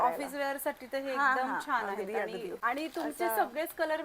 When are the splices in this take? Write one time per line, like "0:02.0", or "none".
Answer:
0:02.5

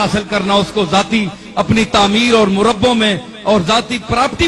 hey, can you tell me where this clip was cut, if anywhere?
none

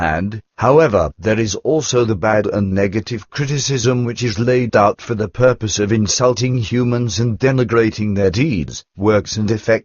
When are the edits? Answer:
0:01.9

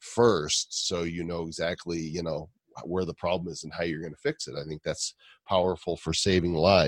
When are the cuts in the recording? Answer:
none

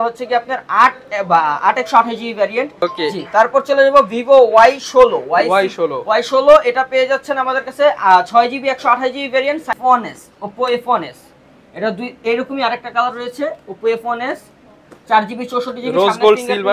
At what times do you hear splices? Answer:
0:02.7
0:09.7

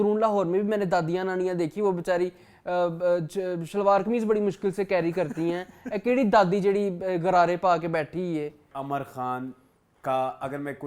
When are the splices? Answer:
0:08.7

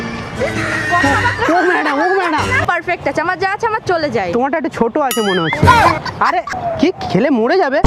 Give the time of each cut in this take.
0:02.6
0:06.5

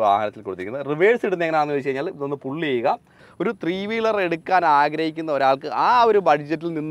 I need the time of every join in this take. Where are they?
0:03.2

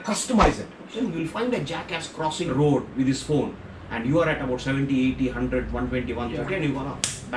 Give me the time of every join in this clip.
0:00.9
0:02.5

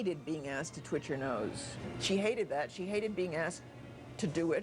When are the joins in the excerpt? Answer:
0:01.8

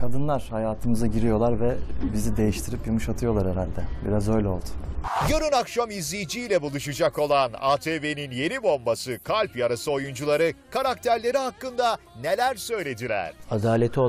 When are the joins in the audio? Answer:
0:05.0

